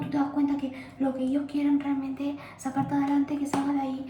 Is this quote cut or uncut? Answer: uncut